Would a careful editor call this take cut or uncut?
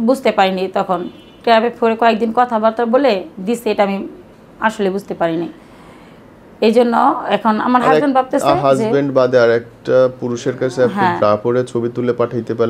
uncut